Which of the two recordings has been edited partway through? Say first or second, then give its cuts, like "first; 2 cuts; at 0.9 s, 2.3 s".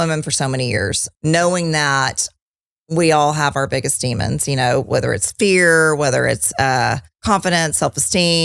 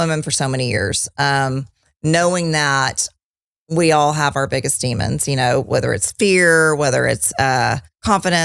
first; 1 cut; at 1.0 s